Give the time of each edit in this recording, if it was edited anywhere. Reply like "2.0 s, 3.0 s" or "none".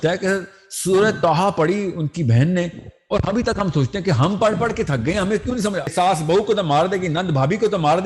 5.9 s